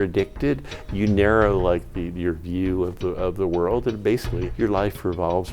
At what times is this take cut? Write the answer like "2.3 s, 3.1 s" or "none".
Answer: 4.4 s